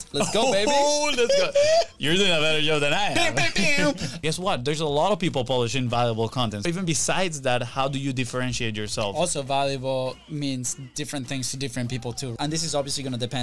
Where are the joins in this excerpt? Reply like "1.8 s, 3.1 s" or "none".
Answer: 4.2 s, 6.6 s, 10.2 s, 12.3 s